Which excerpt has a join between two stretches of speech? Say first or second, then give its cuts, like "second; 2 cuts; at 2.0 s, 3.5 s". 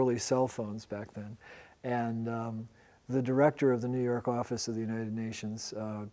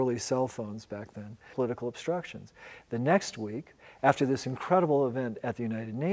first; 1 cut; at 1.5 s